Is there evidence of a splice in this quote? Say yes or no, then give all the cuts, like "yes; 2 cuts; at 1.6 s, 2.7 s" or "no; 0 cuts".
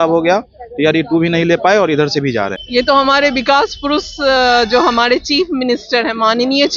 yes; 1 cut; at 2.6 s